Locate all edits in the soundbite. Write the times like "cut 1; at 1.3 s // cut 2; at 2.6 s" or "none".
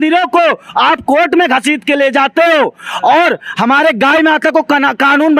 none